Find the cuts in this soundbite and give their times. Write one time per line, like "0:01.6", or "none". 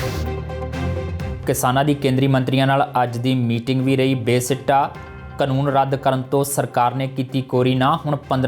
0:01.2